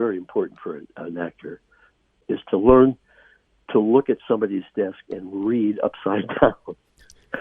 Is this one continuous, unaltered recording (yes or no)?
no